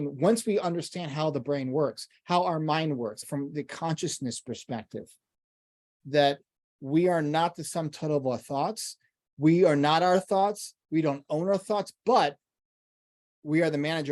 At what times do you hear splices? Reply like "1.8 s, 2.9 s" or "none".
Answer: 3.2 s, 6.0 s